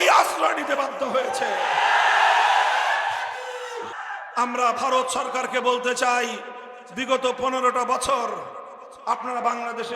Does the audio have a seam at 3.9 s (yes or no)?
yes